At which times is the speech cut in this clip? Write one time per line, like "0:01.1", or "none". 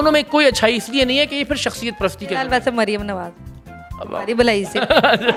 none